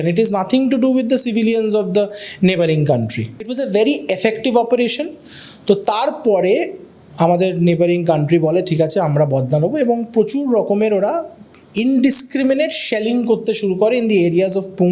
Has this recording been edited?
yes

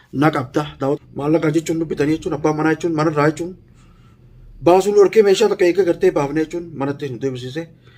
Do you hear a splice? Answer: yes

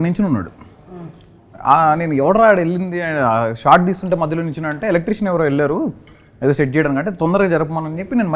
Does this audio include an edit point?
no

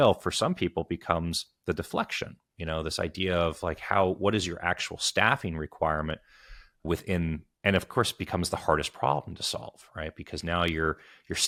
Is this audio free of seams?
yes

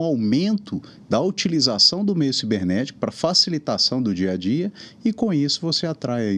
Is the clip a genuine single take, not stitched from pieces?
yes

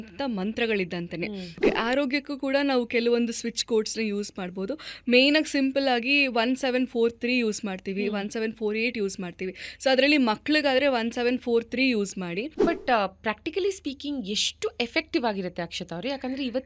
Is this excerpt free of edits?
no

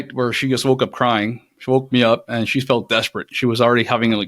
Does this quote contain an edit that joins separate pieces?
no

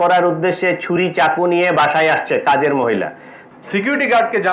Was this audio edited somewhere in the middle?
yes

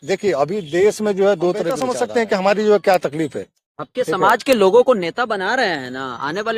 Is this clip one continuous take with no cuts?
no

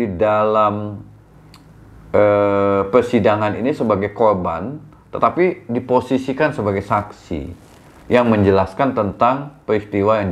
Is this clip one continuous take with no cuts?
yes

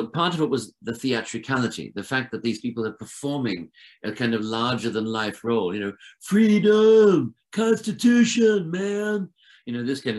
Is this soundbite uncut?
yes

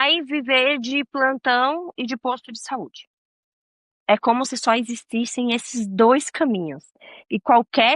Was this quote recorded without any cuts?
yes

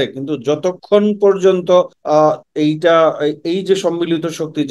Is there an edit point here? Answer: yes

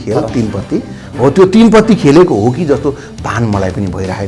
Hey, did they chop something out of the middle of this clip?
no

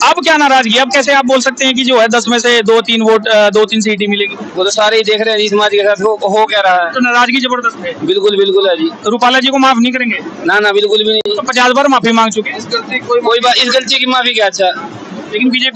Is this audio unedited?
yes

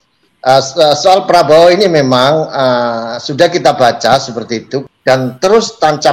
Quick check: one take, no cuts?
no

